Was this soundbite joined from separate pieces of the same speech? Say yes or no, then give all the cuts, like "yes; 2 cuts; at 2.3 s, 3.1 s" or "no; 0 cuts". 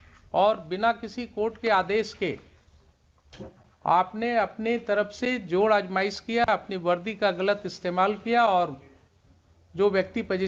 no; 0 cuts